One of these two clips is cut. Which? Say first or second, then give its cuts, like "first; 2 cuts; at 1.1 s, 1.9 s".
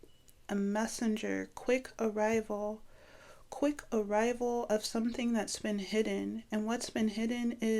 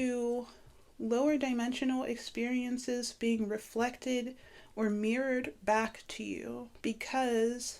second; 1 cut; at 6.7 s